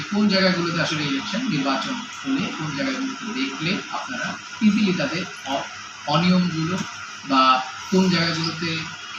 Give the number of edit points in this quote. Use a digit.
0